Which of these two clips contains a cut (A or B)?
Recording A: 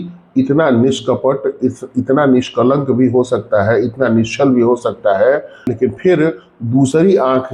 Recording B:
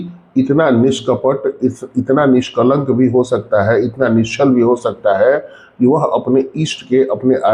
A